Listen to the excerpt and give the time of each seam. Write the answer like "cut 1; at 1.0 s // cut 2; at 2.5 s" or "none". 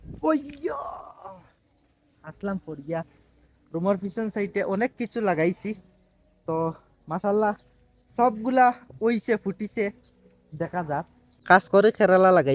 cut 1; at 11.3 s